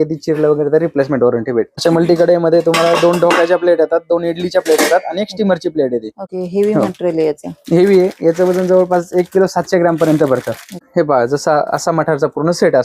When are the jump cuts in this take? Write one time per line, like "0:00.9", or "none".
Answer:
0:01.7
0:06.2
0:10.8